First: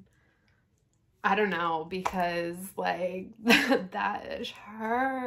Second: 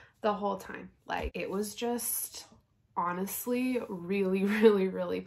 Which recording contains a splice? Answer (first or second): second